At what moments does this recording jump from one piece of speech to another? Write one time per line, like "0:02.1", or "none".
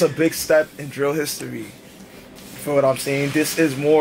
none